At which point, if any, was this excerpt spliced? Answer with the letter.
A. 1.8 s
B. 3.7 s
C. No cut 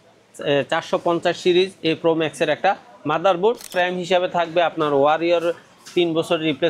B